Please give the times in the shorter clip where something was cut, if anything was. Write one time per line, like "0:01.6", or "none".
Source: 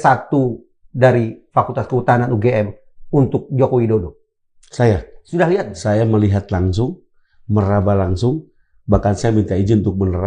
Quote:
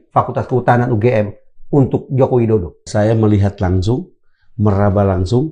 0:02.8